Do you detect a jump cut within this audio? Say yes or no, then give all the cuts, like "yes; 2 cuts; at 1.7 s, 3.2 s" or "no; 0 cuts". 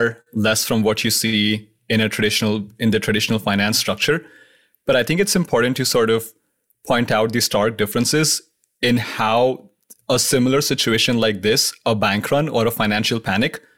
no; 0 cuts